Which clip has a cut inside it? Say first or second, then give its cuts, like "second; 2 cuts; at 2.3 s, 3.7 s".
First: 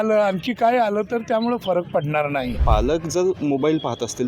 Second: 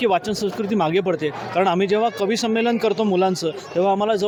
first; 1 cut; at 2.6 s